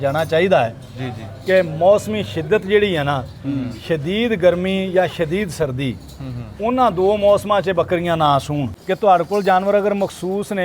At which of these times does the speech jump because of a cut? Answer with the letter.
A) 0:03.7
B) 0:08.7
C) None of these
B